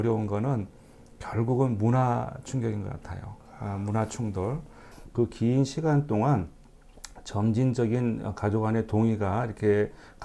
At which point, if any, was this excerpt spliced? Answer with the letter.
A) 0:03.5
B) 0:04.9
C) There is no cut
B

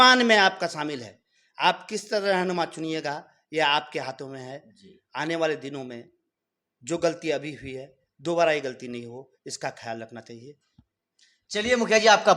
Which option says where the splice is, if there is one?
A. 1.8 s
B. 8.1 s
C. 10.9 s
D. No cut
D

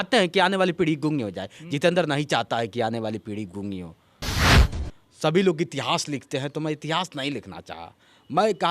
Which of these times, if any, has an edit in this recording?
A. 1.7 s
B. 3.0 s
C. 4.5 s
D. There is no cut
C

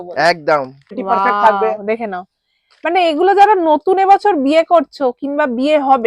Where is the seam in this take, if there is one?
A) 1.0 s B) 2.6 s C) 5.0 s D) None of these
A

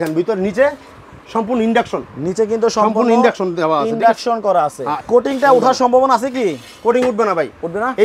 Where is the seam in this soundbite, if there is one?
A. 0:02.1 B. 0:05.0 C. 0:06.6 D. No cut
B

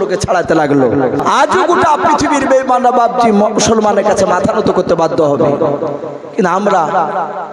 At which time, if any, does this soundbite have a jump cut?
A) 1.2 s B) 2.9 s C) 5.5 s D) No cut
A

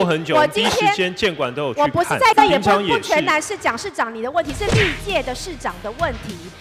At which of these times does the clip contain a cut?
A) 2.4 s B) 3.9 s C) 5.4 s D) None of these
A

